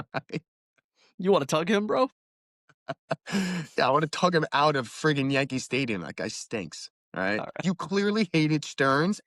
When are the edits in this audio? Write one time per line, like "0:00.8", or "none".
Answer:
0:07.6